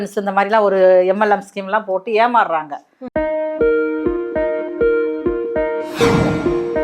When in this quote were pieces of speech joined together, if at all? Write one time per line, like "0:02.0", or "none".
0:03.0